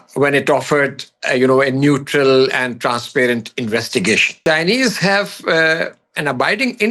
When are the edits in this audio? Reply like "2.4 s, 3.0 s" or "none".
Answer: 4.4 s